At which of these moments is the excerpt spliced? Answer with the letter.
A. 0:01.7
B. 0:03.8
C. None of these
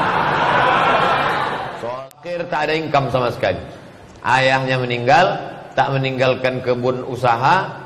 A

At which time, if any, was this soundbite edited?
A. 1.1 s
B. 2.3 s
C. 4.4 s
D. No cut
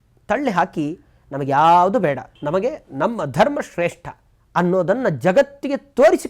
B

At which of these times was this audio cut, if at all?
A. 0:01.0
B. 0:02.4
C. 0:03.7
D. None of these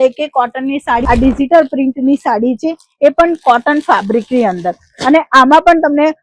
A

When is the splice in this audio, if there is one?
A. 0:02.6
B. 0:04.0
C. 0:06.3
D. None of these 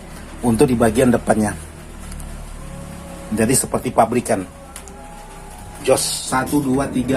C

